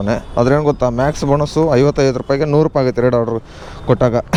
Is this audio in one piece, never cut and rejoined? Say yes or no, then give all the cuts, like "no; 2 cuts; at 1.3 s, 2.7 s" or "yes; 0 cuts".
yes; 0 cuts